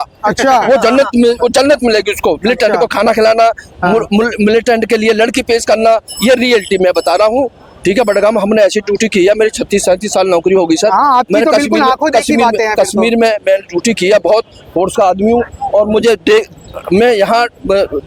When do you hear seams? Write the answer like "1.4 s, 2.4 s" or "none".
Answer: none